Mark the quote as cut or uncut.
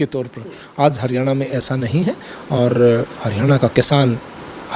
uncut